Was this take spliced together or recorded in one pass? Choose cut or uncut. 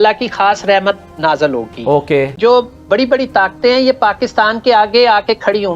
cut